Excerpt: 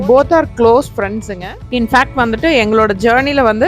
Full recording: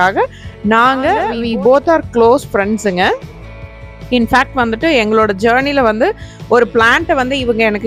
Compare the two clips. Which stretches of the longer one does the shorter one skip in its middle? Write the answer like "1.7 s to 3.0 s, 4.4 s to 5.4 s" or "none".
2.8 s to 3.6 s